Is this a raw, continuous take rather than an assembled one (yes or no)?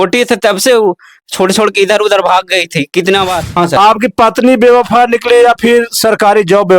no